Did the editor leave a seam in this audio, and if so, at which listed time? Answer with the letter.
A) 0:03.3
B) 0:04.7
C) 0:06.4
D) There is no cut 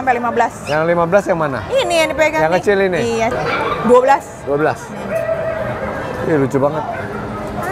A